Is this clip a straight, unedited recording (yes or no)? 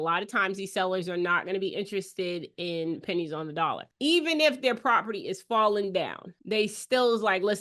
yes